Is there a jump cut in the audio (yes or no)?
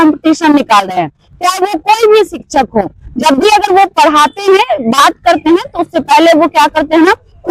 no